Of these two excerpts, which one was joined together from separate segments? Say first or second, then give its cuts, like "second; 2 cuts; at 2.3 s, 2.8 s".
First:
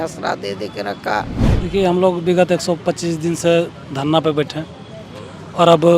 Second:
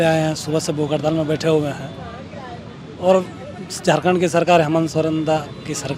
first; 1 cut; at 1.4 s